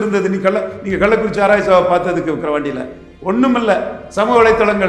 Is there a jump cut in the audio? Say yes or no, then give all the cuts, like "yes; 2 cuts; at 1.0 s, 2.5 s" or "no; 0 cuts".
no; 0 cuts